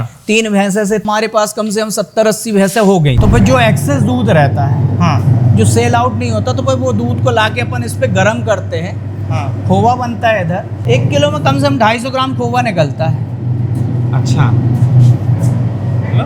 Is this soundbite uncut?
no; 3 cuts; at 1.1 s, 3.2 s, 10.8 s

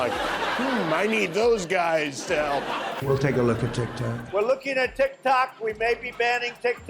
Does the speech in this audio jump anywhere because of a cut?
yes; 1 cut; at 3.0 s

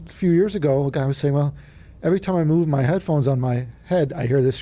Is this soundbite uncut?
yes; 0 cuts

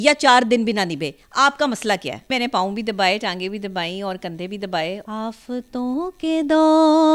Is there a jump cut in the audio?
yes; 2 cuts; at 2.3 s, 5.0 s

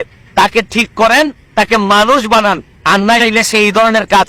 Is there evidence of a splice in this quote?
no; 0 cuts

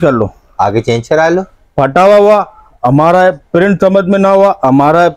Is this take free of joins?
yes; 0 cuts

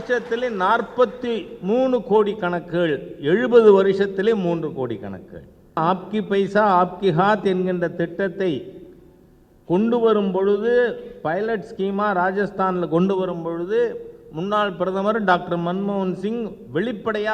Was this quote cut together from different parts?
yes; 1 cut; at 5.8 s

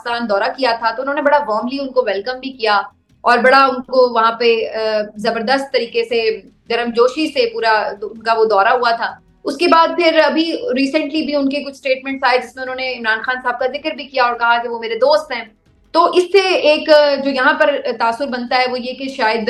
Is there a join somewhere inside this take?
no; 0 cuts

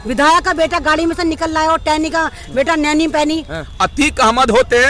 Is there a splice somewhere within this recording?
yes; 1 cut; at 3.6 s

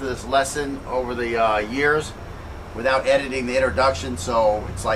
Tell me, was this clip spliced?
yes; 1 cut; at 3.6 s

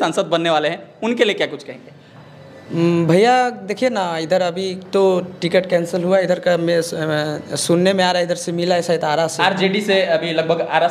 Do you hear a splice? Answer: no; 0 cuts

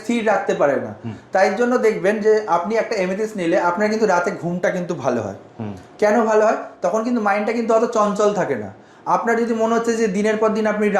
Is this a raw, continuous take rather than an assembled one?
yes; 0 cuts

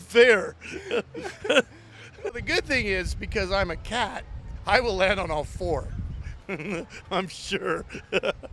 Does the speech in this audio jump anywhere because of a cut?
yes; 1 cut; at 2.3 s

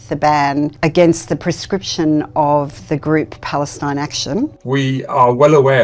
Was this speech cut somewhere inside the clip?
yes; 1 cut; at 4.5 s

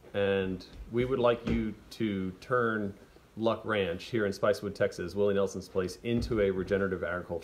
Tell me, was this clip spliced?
no; 0 cuts

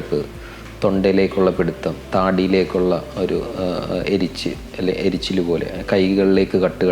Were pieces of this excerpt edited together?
no; 0 cuts

